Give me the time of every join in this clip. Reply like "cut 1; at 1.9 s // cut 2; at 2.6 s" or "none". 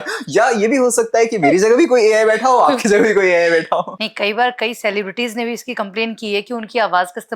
cut 1; at 4.0 s

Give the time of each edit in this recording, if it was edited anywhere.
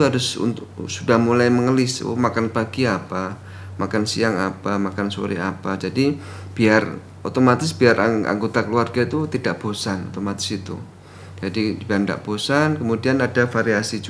none

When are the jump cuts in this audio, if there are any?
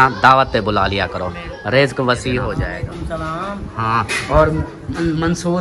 cut 1; at 2.6 s

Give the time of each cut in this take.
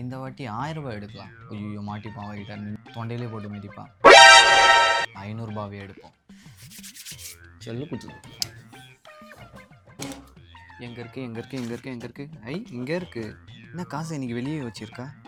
none

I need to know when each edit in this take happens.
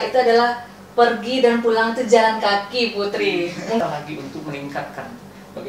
cut 1; at 3.8 s

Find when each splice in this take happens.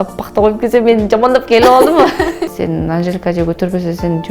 cut 1; at 2.5 s

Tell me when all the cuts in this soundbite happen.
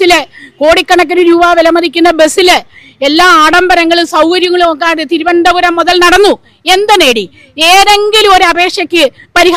none

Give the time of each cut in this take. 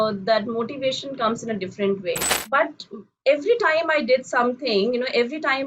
cut 1; at 2.3 s

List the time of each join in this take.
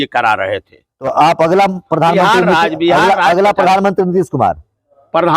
cut 1; at 1.0 s

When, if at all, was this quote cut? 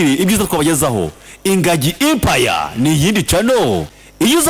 none

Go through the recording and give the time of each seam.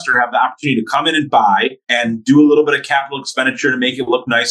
cut 1; at 1.8 s

